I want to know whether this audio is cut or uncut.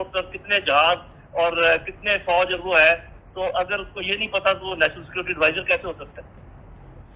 uncut